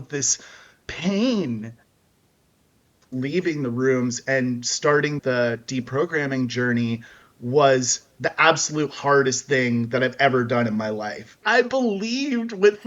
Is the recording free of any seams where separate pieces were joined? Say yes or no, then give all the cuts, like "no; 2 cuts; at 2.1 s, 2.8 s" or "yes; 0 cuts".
no; 2 cuts; at 3.1 s, 11.4 s